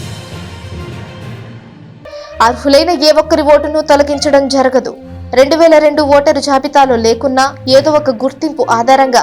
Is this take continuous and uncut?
no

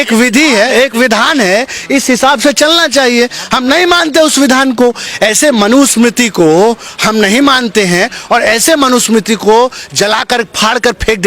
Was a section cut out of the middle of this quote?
yes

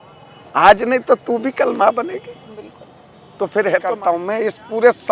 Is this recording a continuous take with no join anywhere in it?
no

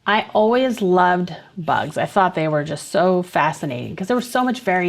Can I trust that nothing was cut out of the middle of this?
yes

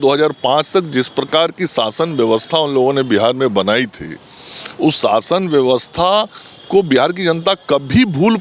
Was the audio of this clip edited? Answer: no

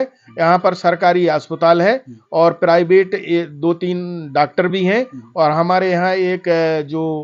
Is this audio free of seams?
yes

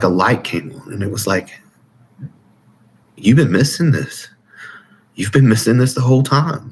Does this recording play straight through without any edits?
yes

